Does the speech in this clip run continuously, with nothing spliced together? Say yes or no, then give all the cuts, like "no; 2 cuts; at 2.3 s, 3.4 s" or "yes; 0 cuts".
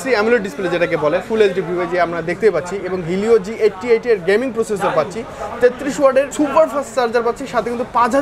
yes; 0 cuts